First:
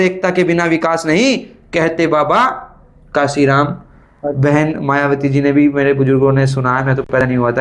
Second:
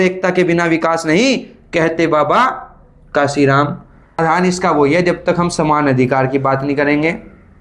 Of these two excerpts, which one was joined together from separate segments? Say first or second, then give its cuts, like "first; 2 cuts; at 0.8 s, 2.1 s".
second; 1 cut; at 4.2 s